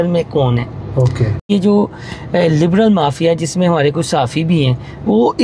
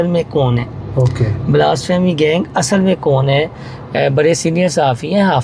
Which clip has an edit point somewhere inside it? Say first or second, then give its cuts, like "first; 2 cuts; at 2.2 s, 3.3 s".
first; 1 cut; at 1.5 s